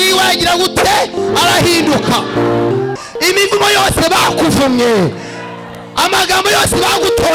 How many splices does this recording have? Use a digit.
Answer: 1